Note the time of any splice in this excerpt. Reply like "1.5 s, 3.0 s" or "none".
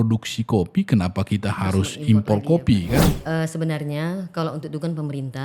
3.1 s